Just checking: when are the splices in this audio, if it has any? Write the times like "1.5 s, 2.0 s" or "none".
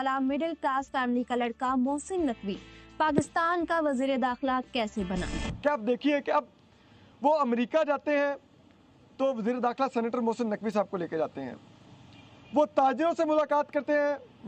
none